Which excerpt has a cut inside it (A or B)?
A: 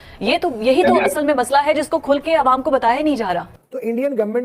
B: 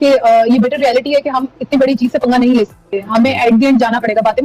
A